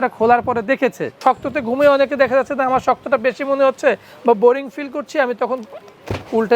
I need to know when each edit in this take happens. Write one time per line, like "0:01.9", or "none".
0:01.1